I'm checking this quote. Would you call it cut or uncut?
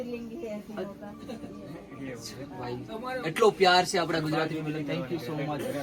uncut